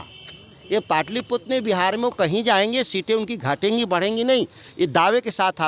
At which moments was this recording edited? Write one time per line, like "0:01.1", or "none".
none